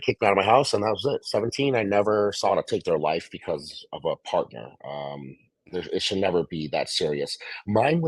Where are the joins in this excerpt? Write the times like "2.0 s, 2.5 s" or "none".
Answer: 2.5 s

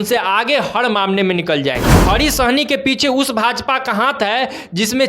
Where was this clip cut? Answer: 1.9 s

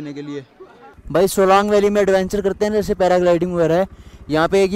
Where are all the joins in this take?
none

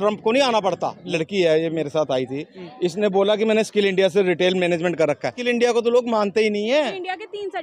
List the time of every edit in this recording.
1.0 s, 5.4 s, 6.9 s

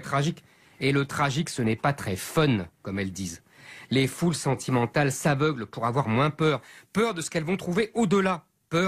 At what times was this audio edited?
6.7 s

